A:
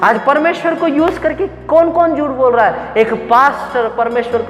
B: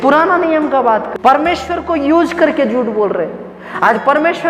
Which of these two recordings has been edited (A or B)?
B